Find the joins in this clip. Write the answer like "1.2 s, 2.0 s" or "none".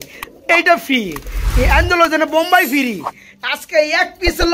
none